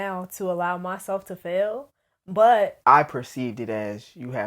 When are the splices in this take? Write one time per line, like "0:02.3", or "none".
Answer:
0:02.8